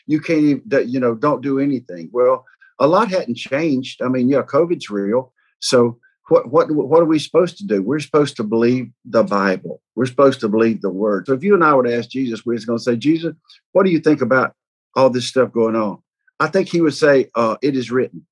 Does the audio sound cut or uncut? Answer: cut